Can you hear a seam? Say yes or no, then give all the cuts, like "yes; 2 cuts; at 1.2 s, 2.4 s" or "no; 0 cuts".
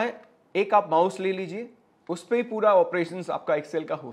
no; 0 cuts